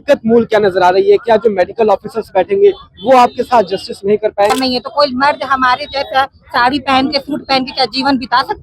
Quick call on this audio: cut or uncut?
cut